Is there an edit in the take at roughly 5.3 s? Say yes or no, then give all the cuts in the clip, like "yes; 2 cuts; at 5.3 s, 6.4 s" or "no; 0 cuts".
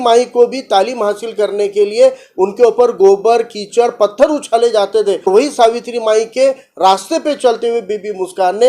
yes; 1 cut; at 5.3 s